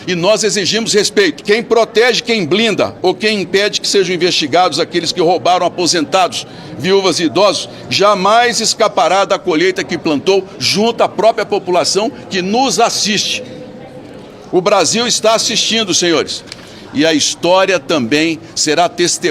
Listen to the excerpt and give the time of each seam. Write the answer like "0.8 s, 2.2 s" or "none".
1.4 s